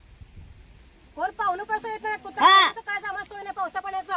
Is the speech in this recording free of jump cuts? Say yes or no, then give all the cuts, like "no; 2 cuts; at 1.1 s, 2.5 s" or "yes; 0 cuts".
yes; 0 cuts